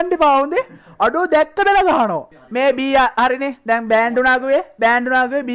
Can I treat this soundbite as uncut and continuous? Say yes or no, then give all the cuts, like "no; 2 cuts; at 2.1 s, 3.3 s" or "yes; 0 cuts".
no; 1 cut; at 2.2 s